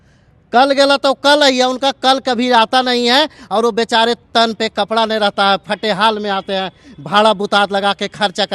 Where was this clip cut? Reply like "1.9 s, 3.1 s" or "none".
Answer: none